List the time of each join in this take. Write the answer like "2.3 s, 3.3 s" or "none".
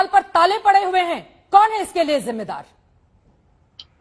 none